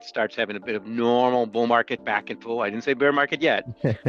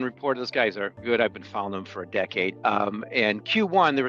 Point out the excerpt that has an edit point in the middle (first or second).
second